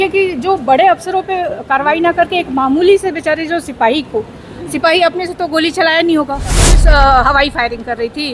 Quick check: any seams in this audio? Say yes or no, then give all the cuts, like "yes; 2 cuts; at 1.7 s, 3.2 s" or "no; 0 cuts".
yes; 1 cut; at 6.7 s